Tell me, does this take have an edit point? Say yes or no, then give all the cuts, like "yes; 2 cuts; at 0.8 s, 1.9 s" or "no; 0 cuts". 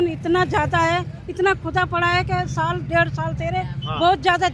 no; 0 cuts